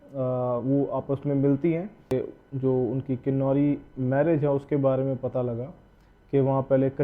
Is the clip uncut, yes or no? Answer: no